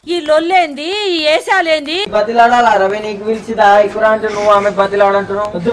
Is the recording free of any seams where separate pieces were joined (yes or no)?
no